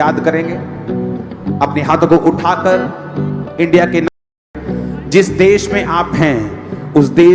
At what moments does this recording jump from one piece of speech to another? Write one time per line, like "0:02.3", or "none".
0:04.3